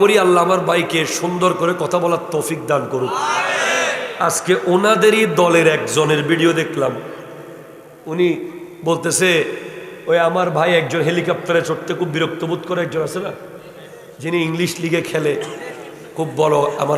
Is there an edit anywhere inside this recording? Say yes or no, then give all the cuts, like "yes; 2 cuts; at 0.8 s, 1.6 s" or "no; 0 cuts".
no; 0 cuts